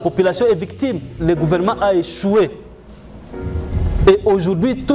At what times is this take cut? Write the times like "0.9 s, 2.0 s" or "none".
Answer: 1.2 s